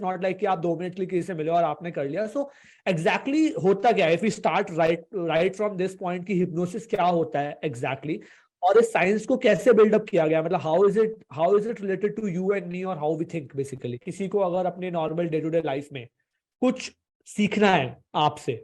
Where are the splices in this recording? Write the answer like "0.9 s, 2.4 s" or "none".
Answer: 14.1 s